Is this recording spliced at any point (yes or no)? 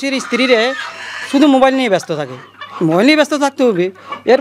no